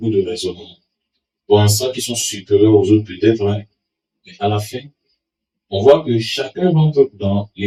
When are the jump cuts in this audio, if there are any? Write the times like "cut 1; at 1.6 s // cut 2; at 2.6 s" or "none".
none